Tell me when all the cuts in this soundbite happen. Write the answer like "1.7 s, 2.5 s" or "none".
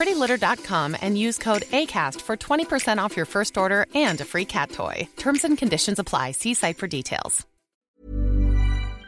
7.8 s

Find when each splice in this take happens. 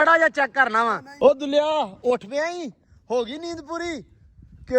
1.1 s

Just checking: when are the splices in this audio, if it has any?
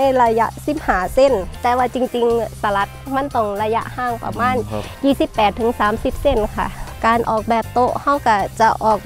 1.5 s, 6.8 s

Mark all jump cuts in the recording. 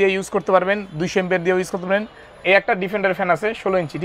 2.3 s

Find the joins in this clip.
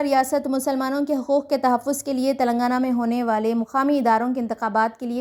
none

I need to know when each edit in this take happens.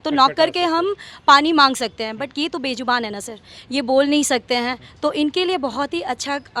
none

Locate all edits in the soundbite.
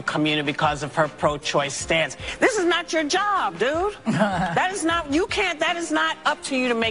2.2 s

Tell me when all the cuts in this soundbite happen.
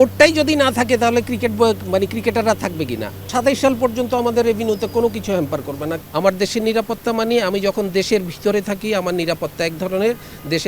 3.3 s, 5.9 s

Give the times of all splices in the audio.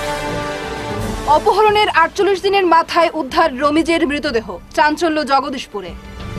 1.0 s

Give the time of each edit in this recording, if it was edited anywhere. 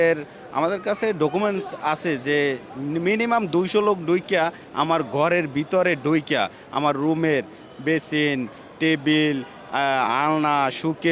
none

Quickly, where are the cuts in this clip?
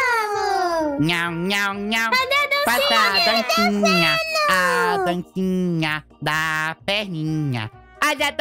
none

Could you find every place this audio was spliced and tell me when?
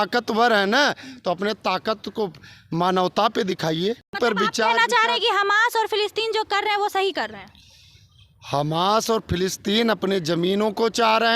4.2 s

